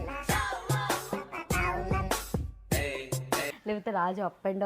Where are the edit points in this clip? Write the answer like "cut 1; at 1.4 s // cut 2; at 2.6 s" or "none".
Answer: cut 1; at 3.5 s